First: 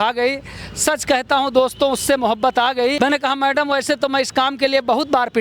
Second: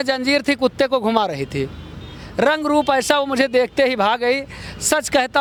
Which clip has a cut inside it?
first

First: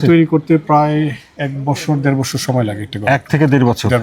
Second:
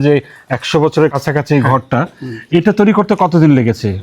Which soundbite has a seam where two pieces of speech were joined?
second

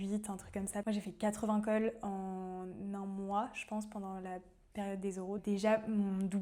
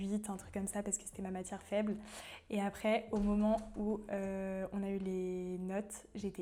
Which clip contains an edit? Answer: first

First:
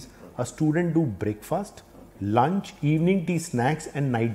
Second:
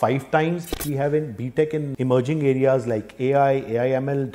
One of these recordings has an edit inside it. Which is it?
second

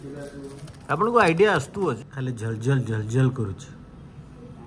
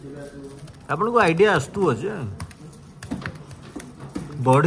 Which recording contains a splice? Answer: first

